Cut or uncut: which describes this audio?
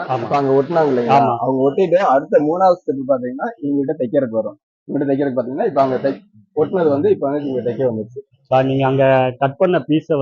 uncut